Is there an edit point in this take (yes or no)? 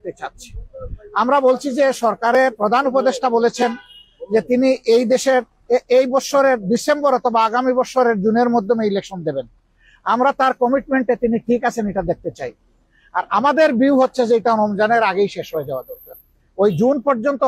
no